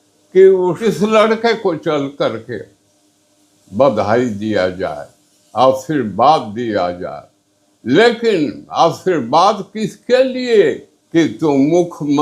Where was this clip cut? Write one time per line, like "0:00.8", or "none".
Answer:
0:00.8
0:10.9